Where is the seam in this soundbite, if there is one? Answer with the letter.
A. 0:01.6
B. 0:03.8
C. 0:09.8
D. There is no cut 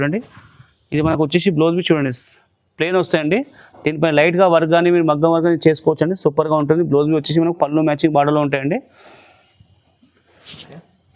D